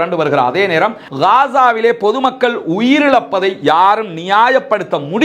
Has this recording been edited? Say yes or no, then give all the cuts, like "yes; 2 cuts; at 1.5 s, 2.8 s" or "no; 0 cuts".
yes; 1 cut; at 1.0 s